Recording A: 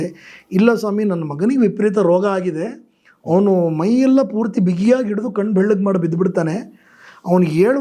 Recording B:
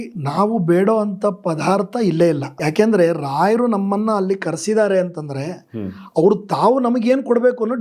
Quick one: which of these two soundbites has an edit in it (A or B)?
B